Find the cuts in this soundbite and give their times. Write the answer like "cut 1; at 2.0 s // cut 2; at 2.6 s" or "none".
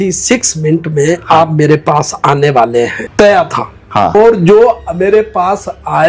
cut 1; at 3.0 s // cut 2; at 4.1 s